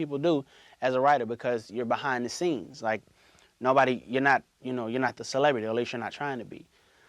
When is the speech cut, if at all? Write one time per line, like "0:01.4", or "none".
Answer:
0:03.4